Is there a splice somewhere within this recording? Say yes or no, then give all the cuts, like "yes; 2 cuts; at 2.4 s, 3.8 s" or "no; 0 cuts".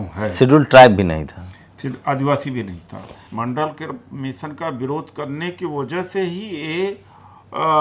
yes; 1 cut; at 3.2 s